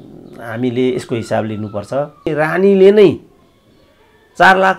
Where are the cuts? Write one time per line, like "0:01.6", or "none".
0:02.3